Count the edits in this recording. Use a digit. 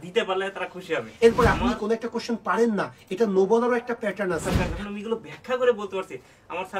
2